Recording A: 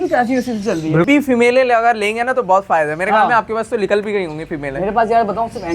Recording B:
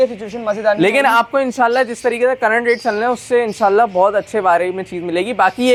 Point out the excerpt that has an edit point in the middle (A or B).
A